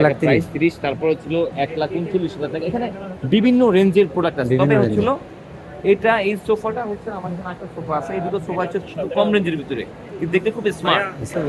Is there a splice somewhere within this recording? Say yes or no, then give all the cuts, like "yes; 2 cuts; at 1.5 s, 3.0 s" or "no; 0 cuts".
no; 0 cuts